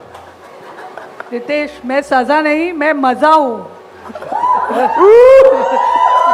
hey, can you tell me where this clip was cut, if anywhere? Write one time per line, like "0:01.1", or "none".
none